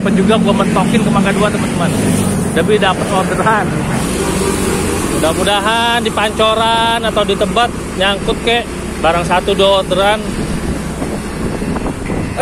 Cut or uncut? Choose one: cut